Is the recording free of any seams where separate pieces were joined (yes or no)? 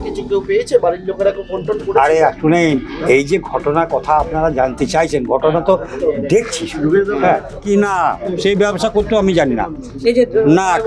no